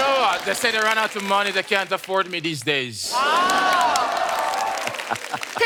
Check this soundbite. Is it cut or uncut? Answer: uncut